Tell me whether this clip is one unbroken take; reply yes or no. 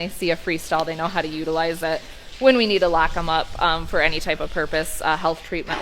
yes